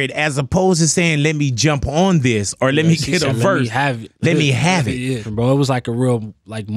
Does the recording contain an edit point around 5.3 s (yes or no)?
yes